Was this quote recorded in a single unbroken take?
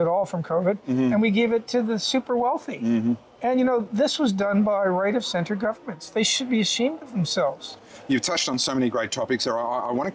yes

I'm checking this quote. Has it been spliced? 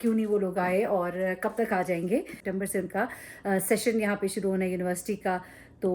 yes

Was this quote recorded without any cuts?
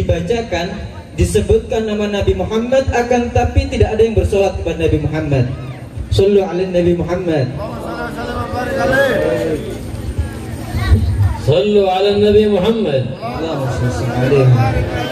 yes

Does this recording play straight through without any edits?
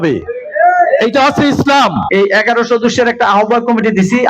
no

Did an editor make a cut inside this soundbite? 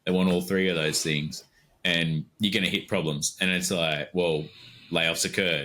no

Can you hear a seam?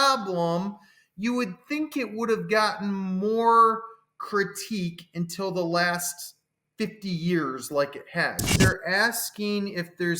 yes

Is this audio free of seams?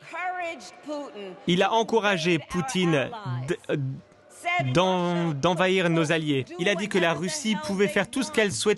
no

